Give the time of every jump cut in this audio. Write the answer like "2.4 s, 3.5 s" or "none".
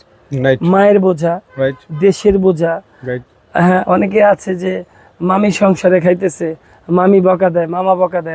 none